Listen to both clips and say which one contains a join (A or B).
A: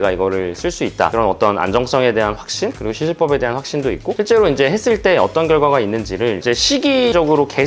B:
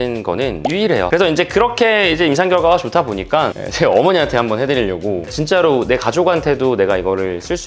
B